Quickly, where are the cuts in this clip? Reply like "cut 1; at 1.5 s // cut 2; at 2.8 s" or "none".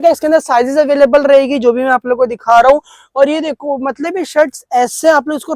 none